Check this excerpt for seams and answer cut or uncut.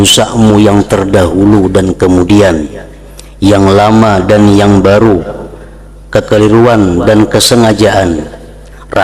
uncut